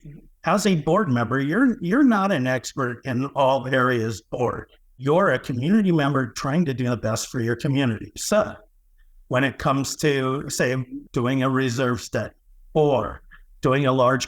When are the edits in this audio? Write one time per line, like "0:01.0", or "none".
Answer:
0:04.9
0:11.0